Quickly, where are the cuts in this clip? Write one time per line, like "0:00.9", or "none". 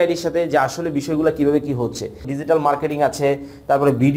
0:02.3